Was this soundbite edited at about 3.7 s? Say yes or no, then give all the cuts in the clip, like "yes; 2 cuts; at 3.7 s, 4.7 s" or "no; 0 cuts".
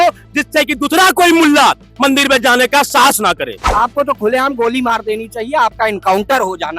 yes; 1 cut; at 3.7 s